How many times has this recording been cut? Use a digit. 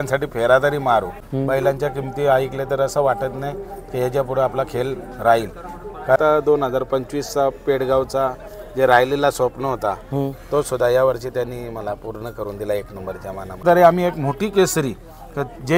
3